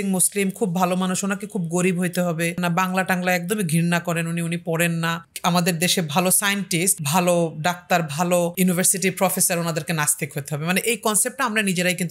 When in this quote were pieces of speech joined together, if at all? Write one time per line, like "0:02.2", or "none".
0:02.6
0:05.2
0:07.0
0:08.5